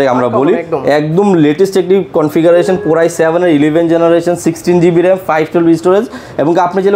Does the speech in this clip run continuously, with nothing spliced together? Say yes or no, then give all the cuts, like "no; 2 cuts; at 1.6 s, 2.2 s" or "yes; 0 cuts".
yes; 0 cuts